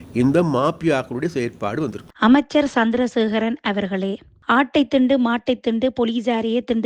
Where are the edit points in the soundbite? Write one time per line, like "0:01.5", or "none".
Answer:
0:02.0